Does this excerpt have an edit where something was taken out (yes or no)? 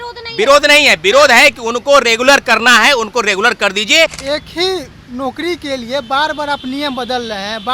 yes